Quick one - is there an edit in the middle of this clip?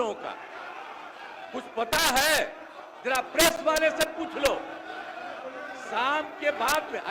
no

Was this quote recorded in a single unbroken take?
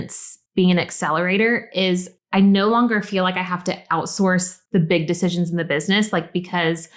yes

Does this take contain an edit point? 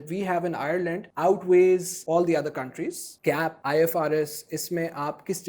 yes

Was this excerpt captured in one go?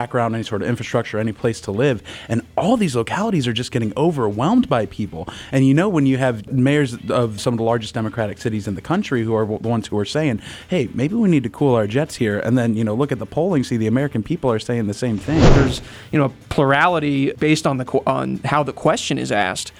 no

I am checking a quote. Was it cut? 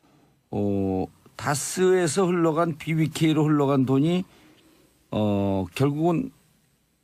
no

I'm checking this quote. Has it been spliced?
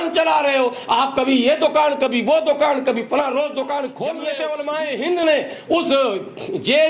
yes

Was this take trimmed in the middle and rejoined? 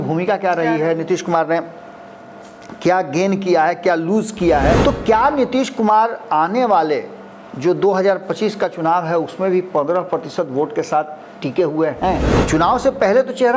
yes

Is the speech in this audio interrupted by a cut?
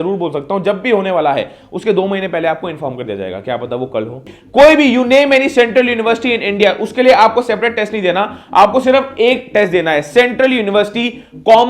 yes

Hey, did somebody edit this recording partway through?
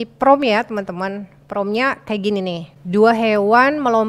yes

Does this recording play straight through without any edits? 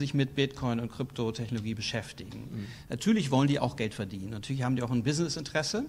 yes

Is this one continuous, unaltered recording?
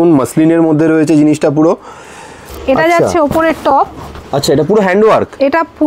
no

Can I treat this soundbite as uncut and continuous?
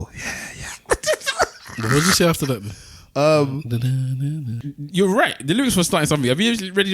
no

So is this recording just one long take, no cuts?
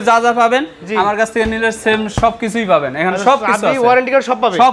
yes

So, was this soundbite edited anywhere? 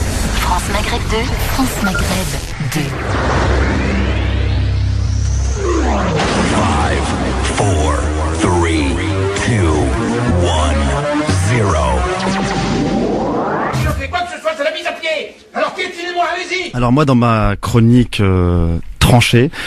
no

